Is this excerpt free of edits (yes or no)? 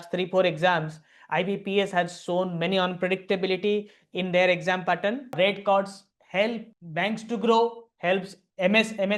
no